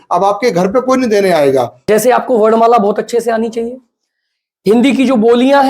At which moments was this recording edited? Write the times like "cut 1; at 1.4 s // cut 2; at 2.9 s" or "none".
cut 1; at 1.8 s